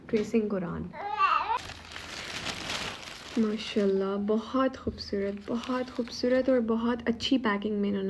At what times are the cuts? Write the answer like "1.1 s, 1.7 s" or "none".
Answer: 1.6 s